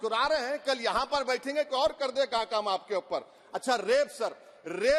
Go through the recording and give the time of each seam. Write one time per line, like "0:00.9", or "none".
none